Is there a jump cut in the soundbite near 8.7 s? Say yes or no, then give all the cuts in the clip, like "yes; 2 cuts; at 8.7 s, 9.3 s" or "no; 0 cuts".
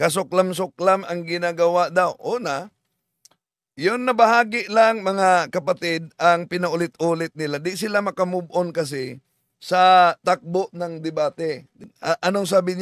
no; 1 cut; at 11.7 s